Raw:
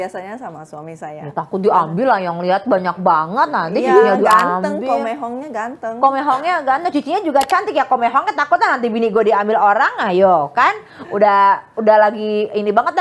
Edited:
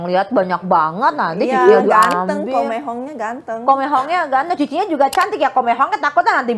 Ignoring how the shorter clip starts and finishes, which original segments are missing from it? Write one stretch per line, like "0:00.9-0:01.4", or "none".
none